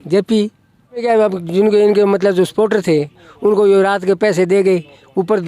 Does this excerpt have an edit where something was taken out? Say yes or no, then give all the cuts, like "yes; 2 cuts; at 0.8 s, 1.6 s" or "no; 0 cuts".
yes; 1 cut; at 1.0 s